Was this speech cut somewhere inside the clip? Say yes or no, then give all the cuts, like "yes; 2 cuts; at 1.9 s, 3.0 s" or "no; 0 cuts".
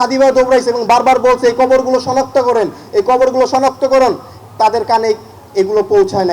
no; 0 cuts